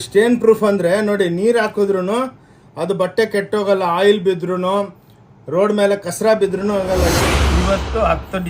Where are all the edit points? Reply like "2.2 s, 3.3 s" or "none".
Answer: 7.2 s

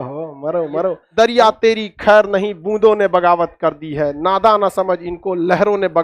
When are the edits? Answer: 1.0 s

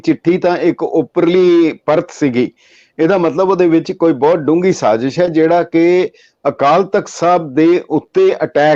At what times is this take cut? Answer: none

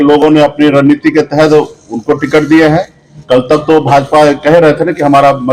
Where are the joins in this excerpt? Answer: none

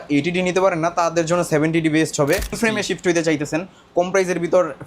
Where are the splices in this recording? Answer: 2.6 s

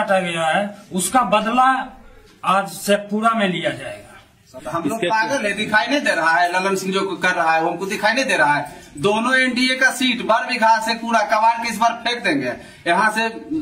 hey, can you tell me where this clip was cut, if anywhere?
4.5 s

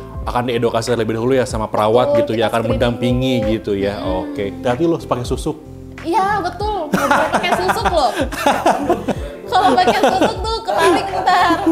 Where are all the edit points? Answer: none

